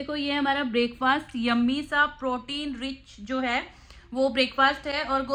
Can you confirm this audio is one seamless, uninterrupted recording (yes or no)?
yes